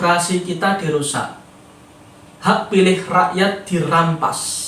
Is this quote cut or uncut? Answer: uncut